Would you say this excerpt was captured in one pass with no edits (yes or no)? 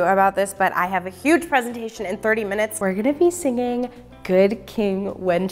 no